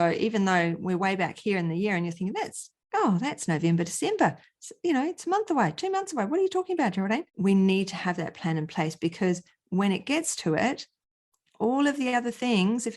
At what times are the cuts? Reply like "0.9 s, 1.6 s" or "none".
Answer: 7.3 s